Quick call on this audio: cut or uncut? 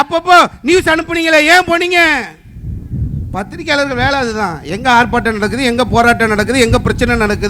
uncut